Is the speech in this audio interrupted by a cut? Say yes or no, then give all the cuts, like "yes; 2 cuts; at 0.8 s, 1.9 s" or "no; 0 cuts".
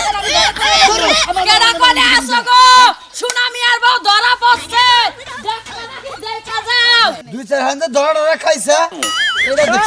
yes; 1 cut; at 7.3 s